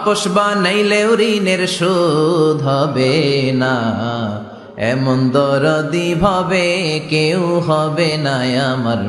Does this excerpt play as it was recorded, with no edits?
yes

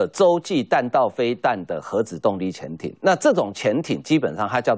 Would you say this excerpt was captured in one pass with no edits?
yes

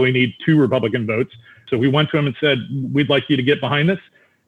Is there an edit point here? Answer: yes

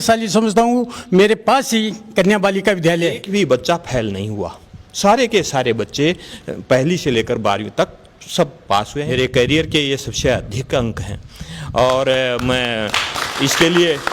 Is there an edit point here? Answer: yes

